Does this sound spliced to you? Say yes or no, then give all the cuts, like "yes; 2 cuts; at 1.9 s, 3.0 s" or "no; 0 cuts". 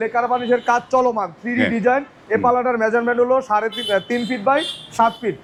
no; 0 cuts